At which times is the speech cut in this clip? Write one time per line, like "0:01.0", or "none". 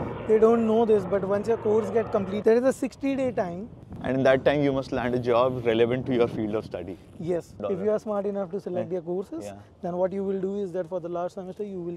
0:03.7
0:07.5